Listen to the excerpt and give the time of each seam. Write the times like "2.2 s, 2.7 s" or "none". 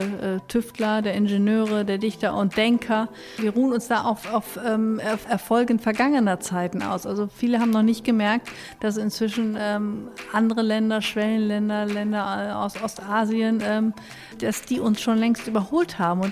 3.2 s, 5.2 s, 14.4 s